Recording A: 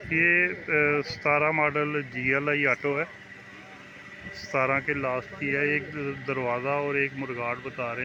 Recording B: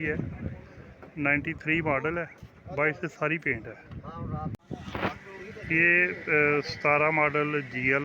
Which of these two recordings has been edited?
B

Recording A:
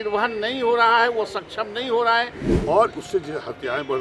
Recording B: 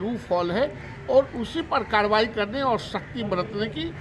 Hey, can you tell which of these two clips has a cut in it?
A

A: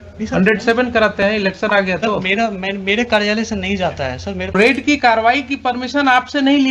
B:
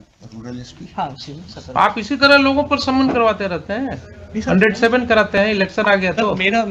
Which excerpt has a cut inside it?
A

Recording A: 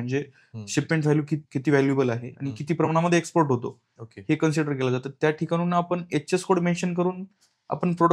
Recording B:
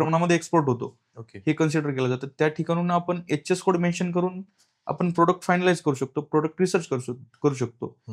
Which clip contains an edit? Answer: A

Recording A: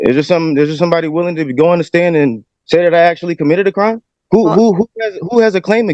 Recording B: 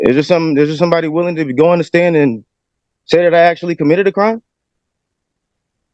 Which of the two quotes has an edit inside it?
A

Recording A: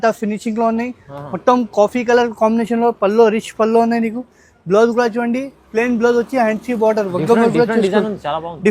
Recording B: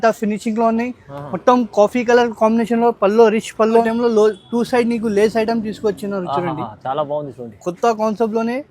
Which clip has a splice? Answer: B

